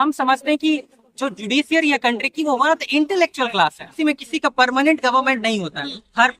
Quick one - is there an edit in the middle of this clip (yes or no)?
yes